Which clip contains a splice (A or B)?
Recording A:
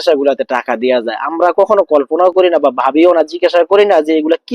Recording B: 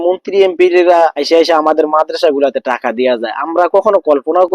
B